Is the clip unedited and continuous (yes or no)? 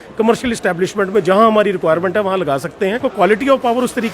no